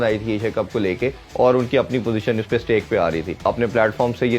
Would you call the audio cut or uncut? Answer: cut